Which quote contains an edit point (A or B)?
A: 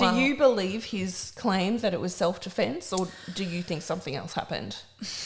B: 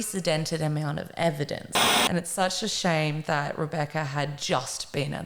B